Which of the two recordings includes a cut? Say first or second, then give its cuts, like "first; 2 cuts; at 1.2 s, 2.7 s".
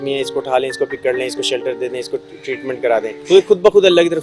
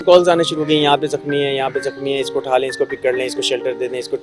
first; 1 cut; at 3.1 s